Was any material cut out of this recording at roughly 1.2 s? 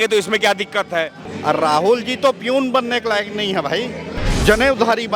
yes; 2 cuts; at 1.2 s, 4.2 s

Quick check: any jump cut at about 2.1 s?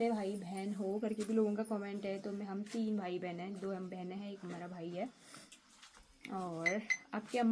no; 0 cuts

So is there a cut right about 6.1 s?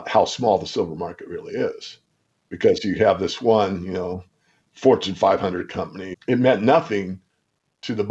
yes; 1 cut; at 6.1 s

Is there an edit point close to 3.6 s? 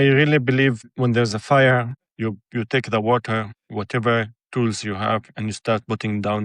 yes; 3 cuts; at 0.8 s, 2.0 s, 3.6 s

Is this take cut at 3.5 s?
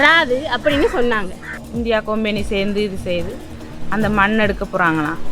no; 1 cut; at 1.6 s

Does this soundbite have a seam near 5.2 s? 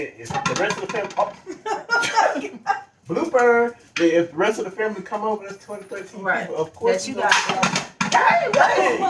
no; 0 cuts

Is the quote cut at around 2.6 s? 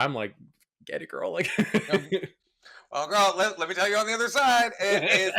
no; 0 cuts

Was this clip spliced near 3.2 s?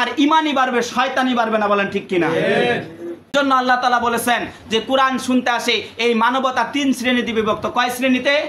yes; 1 cut; at 3.2 s

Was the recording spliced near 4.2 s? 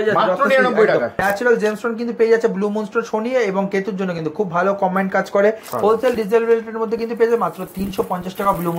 no; 2 cuts; at 1.1 s, 5.7 s

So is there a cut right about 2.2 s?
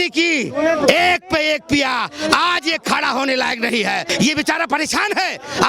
no; 1 cut; at 4.1 s

